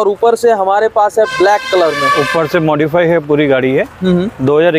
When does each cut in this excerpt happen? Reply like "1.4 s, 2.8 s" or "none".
none